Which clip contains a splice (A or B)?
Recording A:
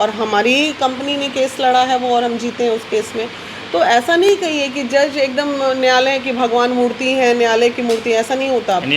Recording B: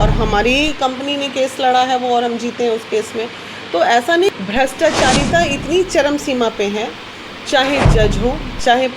B